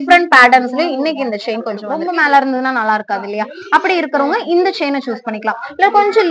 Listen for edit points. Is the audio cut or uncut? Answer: cut